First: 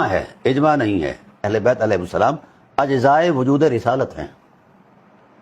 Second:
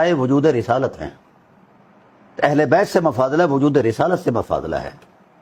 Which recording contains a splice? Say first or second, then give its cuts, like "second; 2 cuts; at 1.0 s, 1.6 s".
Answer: first; 1 cut; at 1.5 s